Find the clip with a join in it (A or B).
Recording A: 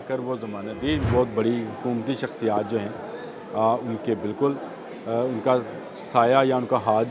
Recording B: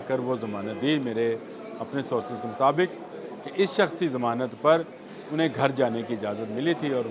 A